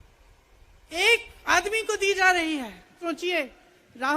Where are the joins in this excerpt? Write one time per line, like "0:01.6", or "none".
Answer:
0:03.0